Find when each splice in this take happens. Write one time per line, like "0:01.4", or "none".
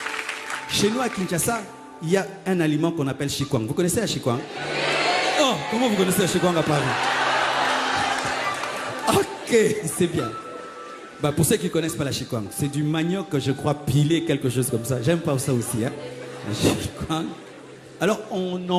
none